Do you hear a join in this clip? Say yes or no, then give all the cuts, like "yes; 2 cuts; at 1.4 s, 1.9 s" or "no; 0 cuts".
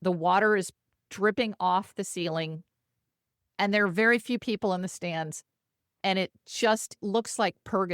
yes; 1 cut; at 7.0 s